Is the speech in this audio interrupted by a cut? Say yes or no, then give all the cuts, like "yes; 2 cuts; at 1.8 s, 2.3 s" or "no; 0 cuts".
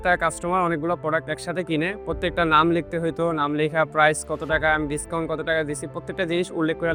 no; 0 cuts